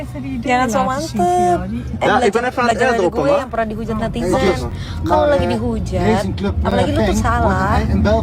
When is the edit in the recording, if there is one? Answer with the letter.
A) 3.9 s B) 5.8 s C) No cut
C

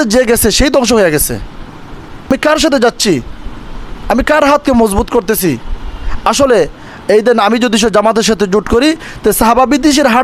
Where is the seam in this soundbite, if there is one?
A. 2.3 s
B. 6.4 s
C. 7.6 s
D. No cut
A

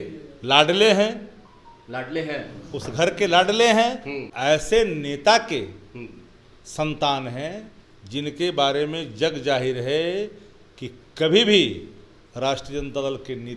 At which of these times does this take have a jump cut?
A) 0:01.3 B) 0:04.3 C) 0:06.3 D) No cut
B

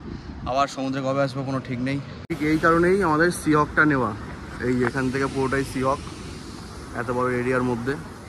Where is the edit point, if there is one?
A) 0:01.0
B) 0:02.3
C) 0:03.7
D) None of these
B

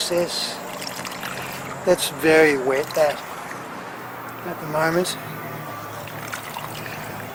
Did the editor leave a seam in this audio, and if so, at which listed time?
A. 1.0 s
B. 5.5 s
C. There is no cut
C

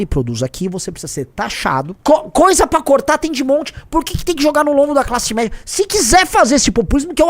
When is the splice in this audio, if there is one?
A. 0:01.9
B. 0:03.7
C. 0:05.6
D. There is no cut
A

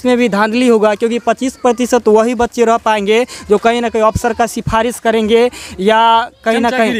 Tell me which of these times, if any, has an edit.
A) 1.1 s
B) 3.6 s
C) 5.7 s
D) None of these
D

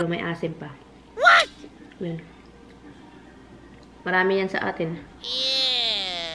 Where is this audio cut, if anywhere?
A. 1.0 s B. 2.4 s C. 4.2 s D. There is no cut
D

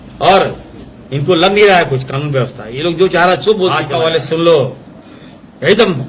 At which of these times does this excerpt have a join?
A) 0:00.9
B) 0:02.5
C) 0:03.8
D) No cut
C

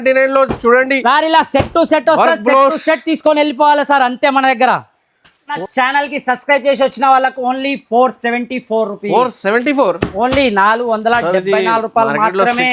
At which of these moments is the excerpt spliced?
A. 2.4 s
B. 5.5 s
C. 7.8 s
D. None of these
B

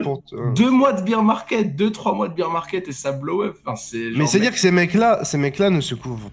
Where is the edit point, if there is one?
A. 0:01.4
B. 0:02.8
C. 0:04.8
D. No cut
D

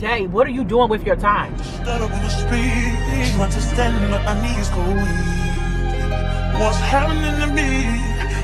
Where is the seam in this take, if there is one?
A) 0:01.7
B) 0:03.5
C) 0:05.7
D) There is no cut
A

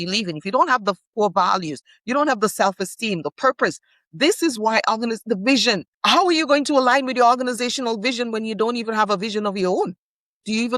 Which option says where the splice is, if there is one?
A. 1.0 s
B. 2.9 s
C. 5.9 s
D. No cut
C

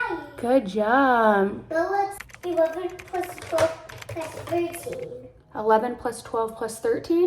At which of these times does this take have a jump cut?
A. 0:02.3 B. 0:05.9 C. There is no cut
A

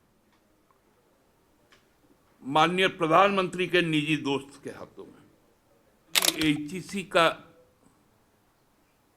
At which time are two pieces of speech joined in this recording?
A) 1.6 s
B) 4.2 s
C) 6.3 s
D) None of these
C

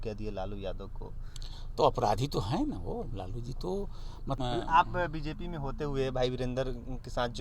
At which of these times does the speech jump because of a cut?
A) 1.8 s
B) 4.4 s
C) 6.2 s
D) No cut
B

